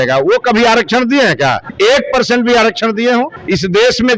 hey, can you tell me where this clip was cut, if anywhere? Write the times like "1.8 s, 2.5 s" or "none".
1.7 s, 3.4 s